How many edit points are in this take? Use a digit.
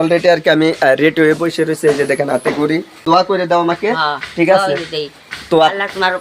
1